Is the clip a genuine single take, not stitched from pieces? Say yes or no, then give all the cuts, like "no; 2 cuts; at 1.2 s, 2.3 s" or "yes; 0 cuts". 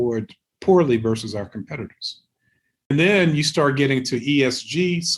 no; 1 cut; at 2.9 s